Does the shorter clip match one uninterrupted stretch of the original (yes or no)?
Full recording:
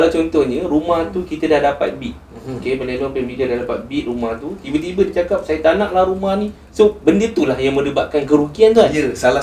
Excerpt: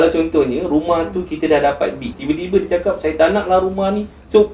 no